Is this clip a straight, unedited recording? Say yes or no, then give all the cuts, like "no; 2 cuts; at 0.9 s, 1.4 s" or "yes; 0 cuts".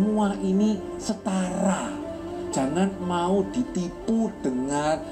yes; 0 cuts